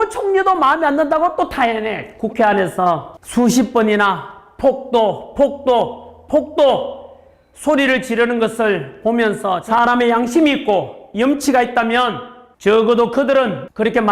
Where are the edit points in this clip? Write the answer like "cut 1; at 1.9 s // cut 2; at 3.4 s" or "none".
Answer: cut 1; at 2.0 s // cut 2; at 9.6 s